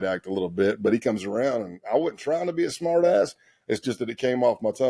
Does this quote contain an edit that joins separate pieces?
no; 0 cuts

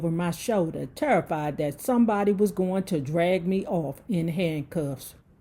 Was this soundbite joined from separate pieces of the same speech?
no; 0 cuts

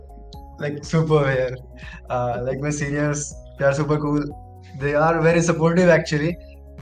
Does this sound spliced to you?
no; 0 cuts

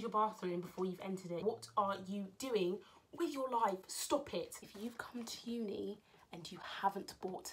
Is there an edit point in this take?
yes; 2 cuts; at 1.4 s, 4.6 s

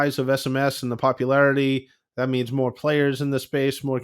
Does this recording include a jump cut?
no; 0 cuts

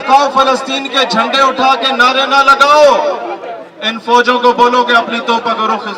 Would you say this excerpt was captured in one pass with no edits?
yes; 0 cuts

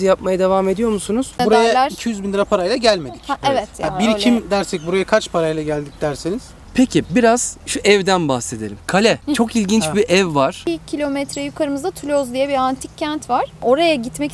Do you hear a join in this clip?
yes; 3 cuts; at 1.3 s, 6.5 s, 10.6 s

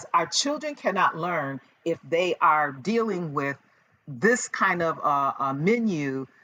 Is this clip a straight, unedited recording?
yes; 0 cuts

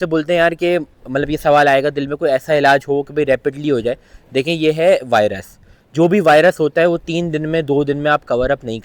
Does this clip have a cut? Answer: no; 0 cuts

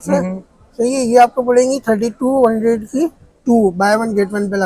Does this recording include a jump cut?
no; 0 cuts

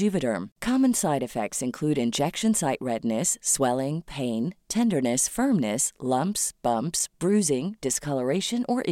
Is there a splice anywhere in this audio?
no; 0 cuts

